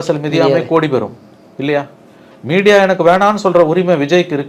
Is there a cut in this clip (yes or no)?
no